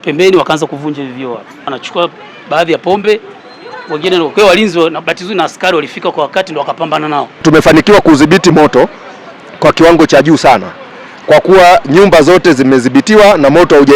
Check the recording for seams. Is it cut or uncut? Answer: cut